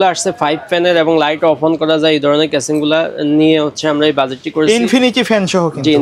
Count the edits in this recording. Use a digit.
0